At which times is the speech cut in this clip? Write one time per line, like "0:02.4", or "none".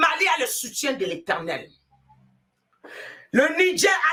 none